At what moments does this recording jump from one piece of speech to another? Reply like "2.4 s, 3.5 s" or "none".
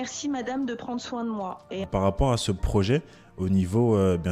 1.9 s